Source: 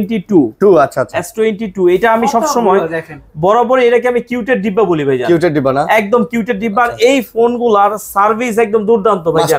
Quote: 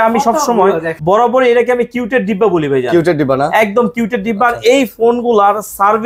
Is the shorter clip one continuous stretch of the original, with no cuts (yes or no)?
no